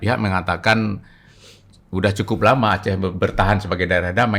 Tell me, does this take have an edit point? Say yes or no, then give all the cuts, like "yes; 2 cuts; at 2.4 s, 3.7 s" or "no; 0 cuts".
no; 0 cuts